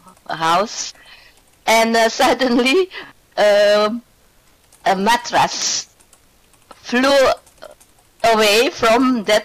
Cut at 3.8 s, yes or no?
yes